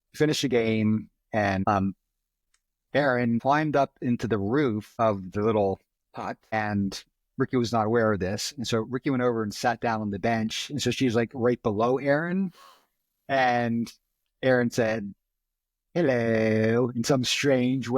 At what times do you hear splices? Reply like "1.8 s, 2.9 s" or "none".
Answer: 1.6 s